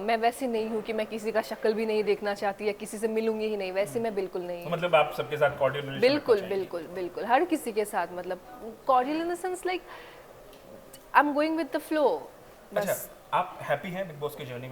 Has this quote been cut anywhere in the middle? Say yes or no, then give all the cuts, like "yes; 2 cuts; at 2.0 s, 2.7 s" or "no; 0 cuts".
no; 0 cuts